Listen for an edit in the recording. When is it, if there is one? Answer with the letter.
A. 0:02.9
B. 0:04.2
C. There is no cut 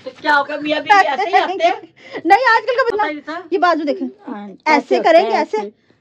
A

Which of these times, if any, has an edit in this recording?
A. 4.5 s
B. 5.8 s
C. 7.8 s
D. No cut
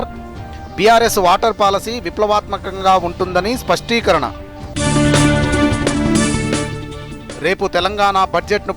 B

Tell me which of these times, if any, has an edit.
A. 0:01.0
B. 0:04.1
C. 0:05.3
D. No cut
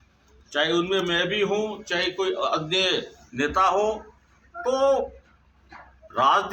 B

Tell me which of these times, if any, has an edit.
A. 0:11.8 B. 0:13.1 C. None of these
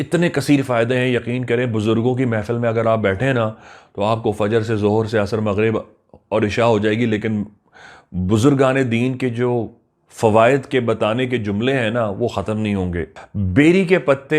B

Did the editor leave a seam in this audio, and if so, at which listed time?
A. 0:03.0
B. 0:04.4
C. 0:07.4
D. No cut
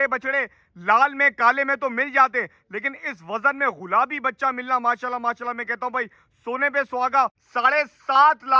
C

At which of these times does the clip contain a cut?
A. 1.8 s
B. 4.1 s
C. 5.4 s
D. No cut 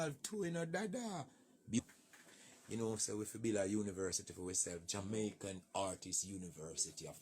A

